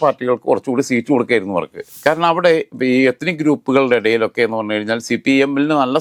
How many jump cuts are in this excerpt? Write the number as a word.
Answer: zero